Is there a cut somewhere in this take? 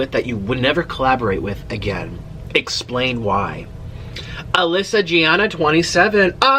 no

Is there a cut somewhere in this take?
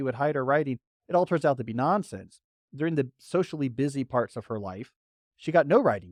no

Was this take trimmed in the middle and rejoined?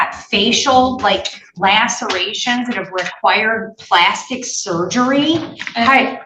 no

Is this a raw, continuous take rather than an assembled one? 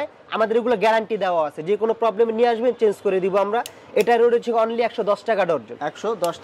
yes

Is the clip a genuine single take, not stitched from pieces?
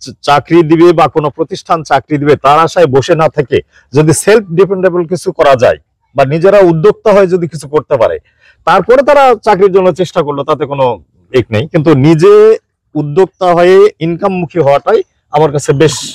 yes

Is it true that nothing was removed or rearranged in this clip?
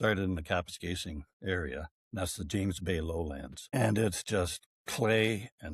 no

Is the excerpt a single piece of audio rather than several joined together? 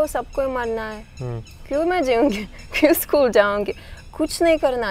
yes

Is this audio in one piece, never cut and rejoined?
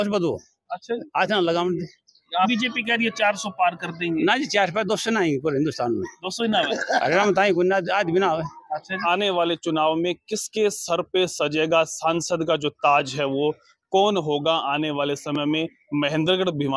no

